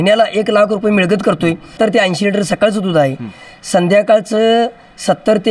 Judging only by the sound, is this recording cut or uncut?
cut